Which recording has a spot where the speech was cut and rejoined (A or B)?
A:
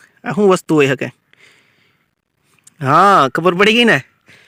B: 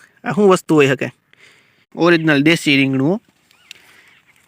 B